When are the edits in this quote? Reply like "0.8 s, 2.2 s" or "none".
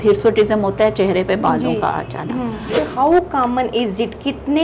2.7 s